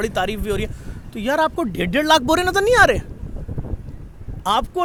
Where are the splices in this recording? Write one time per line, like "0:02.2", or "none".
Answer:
none